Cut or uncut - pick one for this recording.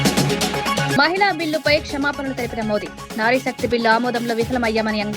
cut